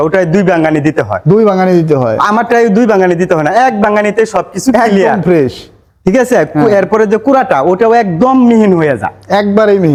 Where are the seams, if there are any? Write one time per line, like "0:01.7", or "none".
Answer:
none